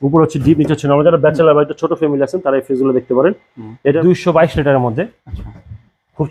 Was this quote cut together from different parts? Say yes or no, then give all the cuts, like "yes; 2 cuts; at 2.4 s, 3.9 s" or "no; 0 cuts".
yes; 1 cut; at 4.0 s